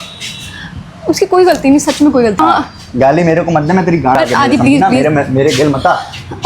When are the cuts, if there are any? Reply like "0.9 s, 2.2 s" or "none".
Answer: 2.4 s, 4.1 s